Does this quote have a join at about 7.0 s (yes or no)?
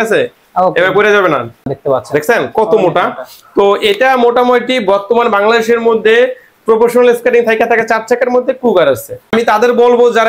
no